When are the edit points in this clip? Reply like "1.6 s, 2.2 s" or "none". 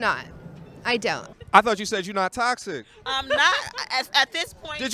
1.3 s